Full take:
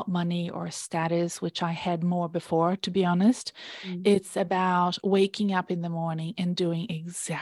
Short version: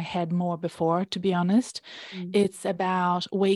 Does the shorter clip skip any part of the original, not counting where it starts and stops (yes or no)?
no